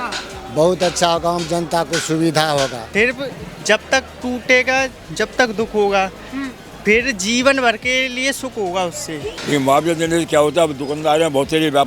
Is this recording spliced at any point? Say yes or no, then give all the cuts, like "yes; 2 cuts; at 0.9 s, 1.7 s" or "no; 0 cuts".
yes; 2 cuts; at 2.8 s, 9.3 s